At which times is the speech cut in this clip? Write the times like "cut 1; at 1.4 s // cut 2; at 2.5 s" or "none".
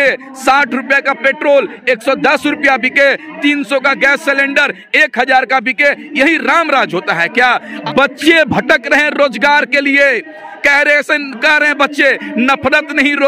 cut 1; at 7.7 s